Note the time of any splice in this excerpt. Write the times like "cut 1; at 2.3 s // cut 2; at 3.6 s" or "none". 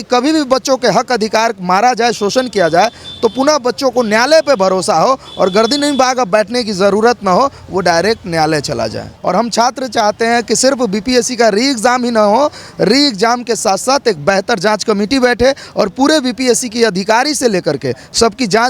cut 1; at 9.1 s